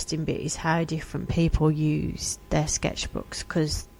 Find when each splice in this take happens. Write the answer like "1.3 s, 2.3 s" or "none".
none